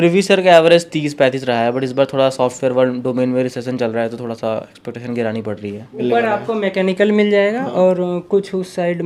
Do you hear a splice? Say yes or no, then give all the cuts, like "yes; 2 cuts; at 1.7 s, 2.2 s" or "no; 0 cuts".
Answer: yes; 1 cut; at 6.0 s